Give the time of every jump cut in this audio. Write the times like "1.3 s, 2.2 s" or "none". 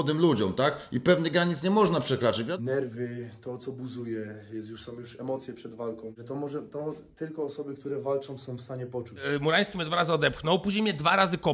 2.5 s, 9.2 s